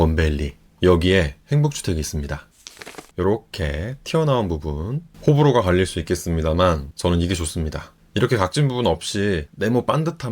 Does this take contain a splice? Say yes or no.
yes